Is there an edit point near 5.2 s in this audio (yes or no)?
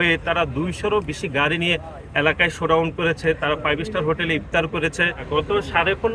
yes